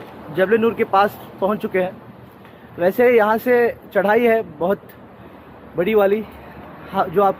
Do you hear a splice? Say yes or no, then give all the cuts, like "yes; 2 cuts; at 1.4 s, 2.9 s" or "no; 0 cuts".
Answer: no; 0 cuts